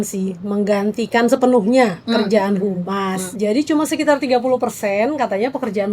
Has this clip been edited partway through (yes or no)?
yes